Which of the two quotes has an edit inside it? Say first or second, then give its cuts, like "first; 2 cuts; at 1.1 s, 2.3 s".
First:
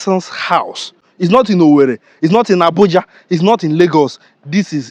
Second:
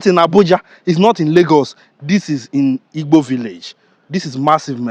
first; 1 cut; at 1.0 s